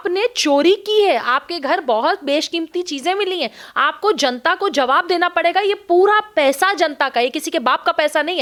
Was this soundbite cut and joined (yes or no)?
no